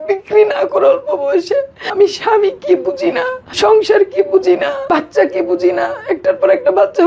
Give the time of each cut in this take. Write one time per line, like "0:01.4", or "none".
0:01.8
0:03.4
0:04.8

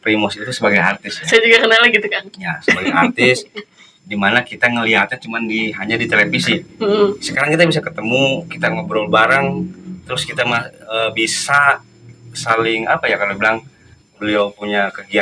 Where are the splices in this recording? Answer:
none

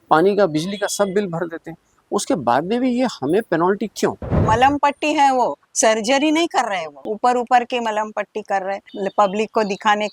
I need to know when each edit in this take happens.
0:04.3
0:07.0
0:08.9

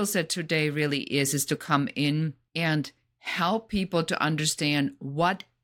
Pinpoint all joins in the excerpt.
0:02.4

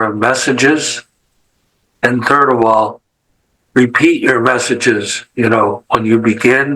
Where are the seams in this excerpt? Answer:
none

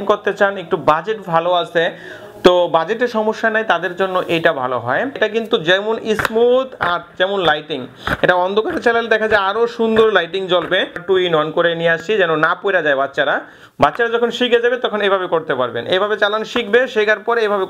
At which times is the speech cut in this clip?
0:05.1
0:11.0

